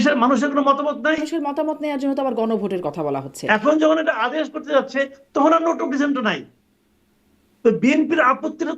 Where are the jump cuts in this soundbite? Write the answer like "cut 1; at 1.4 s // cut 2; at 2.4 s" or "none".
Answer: cut 1; at 1.2 s // cut 2; at 3.3 s